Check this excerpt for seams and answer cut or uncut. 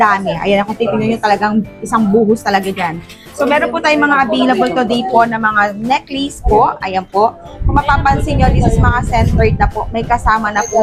uncut